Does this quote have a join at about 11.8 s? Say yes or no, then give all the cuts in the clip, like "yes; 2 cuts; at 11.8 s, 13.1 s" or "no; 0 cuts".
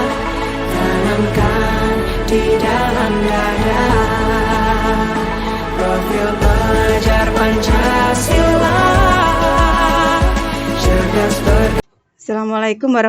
yes; 1 cut; at 11.8 s